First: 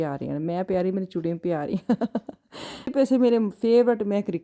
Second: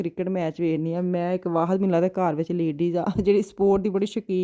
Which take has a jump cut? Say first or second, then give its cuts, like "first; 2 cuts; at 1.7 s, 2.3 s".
first; 1 cut; at 2.9 s